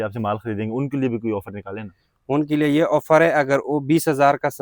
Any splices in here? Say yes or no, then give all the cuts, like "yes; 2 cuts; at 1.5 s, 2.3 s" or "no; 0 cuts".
no; 0 cuts